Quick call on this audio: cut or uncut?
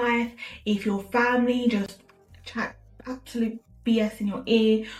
uncut